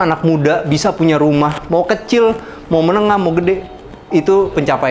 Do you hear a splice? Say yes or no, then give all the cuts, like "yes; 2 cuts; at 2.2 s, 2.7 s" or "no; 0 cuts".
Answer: no; 0 cuts